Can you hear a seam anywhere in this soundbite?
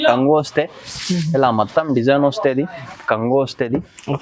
yes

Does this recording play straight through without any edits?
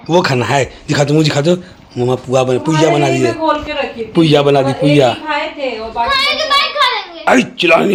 yes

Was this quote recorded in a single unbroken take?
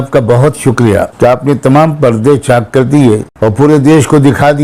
no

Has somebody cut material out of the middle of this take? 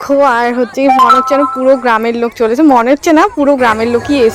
no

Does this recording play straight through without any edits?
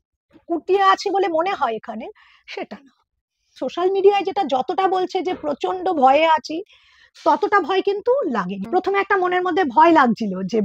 no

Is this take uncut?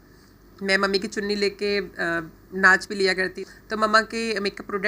no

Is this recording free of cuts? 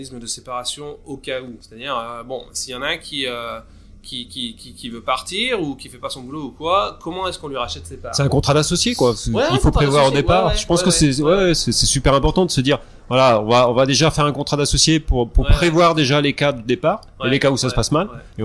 yes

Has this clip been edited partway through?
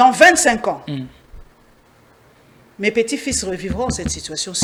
no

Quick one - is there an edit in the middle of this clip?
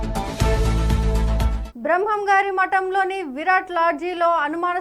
yes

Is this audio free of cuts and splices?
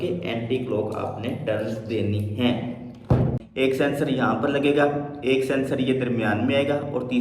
no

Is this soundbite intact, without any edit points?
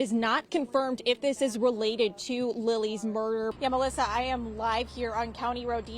no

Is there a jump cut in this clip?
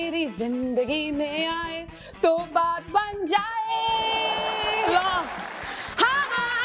no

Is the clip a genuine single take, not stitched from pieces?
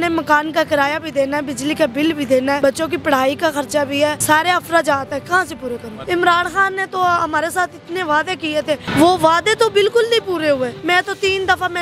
no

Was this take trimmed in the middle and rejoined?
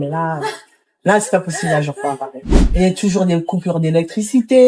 yes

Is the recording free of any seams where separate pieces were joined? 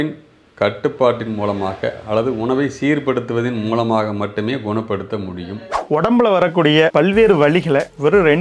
no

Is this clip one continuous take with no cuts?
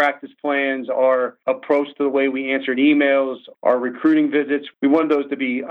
no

